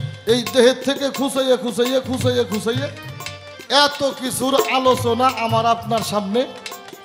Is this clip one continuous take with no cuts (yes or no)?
yes